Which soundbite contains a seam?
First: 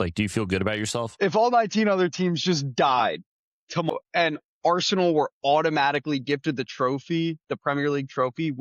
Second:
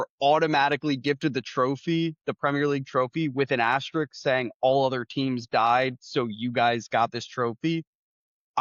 first; 2 cuts; at 1.1 s, 3.9 s

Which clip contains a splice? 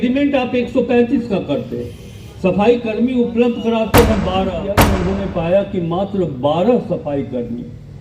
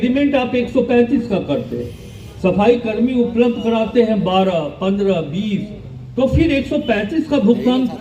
first; 1 cut; at 4.8 s

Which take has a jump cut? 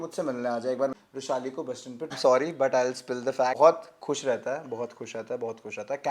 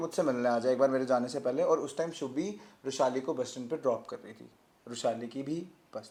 first; 3 cuts; at 0.9 s, 2.1 s, 3.6 s

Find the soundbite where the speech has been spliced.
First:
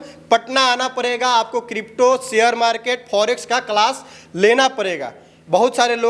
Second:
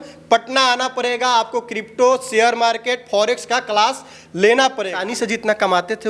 second; 1 cut; at 5.0 s

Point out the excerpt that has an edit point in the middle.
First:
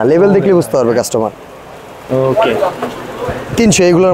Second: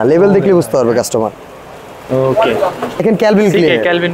second; 1 cut; at 3.0 s

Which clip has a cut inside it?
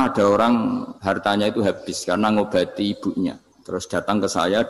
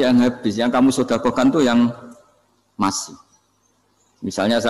first; 2 cuts; at 0.9 s, 3.5 s

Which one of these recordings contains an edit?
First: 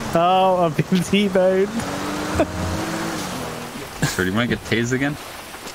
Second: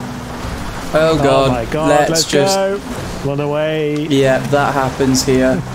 first; 1 cut; at 3.5 s

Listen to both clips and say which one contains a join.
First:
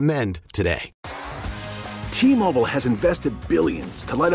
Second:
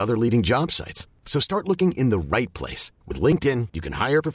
first; 1 cut; at 0.9 s

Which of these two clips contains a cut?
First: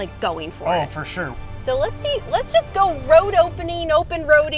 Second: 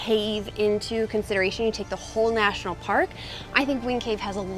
first; 1 cut; at 1.3 s

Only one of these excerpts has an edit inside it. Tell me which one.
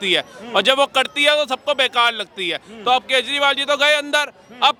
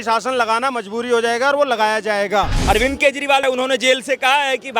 second; 2 cuts; at 2.6 s, 3.4 s

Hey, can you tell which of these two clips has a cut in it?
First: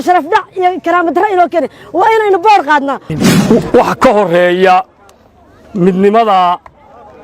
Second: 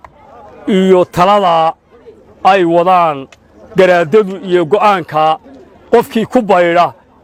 first; 1 cut; at 3.1 s

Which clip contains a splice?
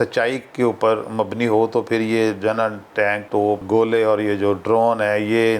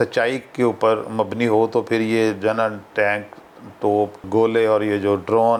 first; 1 cut; at 3.4 s

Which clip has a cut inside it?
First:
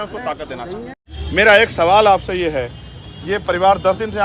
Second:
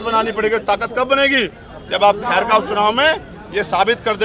first; 1 cut; at 1.2 s

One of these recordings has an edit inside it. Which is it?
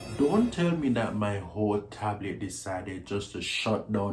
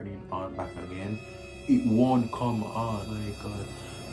second; 1 cut; at 3.1 s

